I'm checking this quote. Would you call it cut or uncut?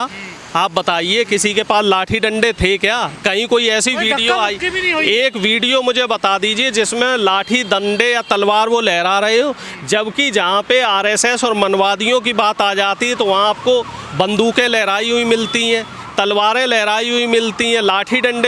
uncut